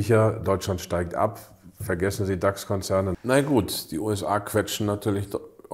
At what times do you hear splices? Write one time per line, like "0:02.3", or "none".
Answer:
0:03.2